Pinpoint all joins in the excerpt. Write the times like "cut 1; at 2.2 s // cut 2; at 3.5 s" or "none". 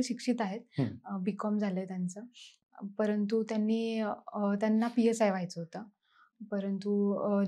none